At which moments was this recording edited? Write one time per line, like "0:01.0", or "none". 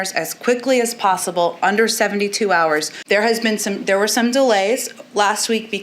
0:03.0